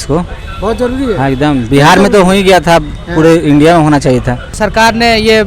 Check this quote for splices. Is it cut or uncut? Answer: cut